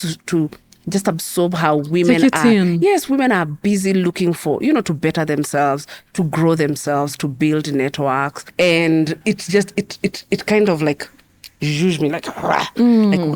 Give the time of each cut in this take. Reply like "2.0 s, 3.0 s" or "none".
8.4 s